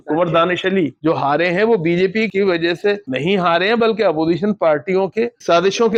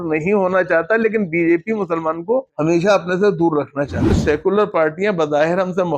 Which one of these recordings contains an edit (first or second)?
second